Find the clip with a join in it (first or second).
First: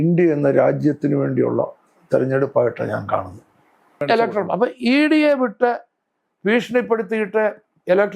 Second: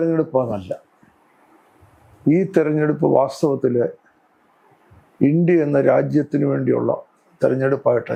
first